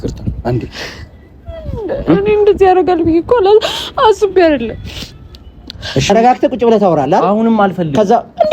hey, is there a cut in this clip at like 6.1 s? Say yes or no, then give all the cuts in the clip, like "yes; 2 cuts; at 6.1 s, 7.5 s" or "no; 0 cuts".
yes; 1 cut; at 6.1 s